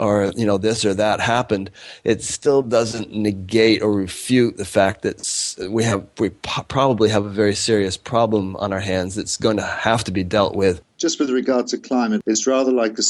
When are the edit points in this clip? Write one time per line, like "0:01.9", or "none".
0:10.9
0:12.2